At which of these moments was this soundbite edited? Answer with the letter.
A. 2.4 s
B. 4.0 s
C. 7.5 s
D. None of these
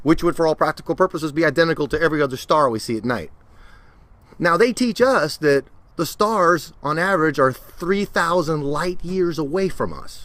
A